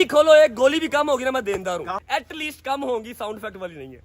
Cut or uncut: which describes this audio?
cut